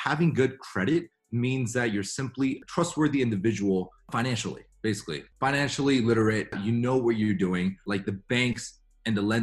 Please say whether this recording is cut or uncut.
cut